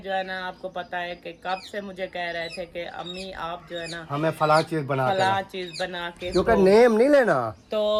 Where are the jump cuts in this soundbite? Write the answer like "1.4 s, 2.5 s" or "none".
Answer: none

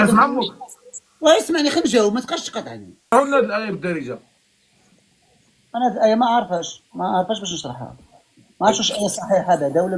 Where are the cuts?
3.1 s

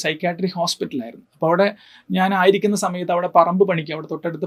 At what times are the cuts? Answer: none

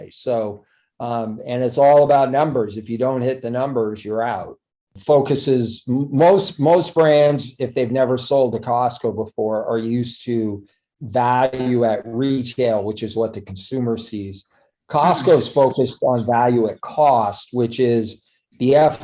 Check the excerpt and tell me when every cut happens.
4.9 s

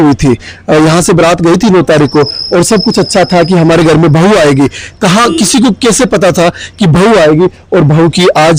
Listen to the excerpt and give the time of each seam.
none

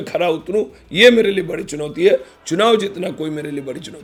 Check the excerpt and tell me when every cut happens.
none

